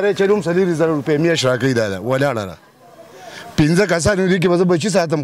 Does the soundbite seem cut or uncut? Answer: uncut